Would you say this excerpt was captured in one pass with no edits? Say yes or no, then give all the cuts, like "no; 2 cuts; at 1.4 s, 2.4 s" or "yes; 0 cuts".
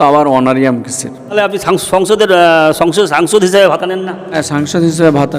no; 2 cuts; at 1.3 s, 4.4 s